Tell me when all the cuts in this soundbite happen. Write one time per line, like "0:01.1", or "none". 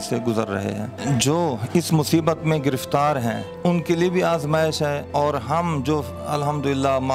0:00.9
0:03.5
0:05.0

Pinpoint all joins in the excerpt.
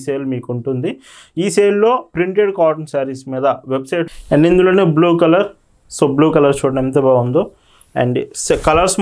0:04.1

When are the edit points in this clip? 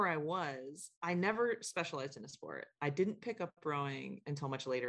none

